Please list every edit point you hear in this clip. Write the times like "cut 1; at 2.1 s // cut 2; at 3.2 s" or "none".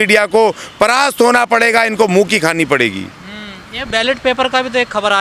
none